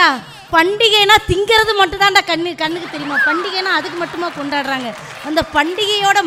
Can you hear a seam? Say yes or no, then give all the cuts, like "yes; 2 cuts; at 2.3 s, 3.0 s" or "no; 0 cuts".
no; 0 cuts